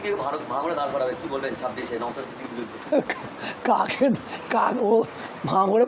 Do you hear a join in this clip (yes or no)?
no